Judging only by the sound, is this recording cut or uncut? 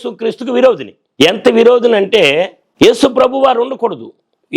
cut